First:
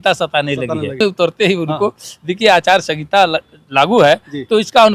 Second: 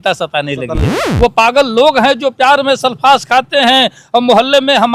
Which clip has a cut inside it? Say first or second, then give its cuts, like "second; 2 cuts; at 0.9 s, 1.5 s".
second; 1 cut; at 0.9 s